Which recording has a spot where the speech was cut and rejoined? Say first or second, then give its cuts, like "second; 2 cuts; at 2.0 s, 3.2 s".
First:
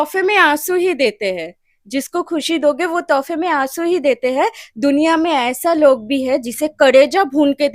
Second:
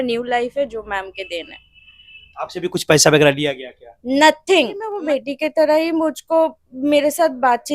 second; 1 cut; at 4.9 s